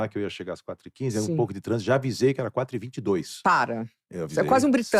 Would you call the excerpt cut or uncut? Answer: uncut